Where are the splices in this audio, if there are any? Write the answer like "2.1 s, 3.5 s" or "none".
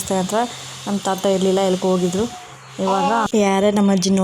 3.3 s